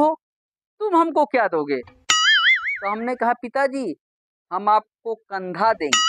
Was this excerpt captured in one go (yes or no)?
yes